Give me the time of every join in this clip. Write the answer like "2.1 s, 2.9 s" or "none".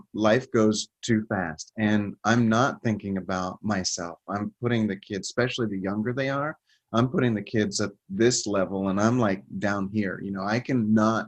none